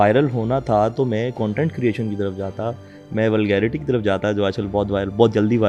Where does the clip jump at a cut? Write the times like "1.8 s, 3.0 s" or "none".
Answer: none